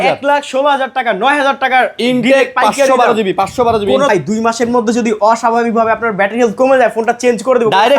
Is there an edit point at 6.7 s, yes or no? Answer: no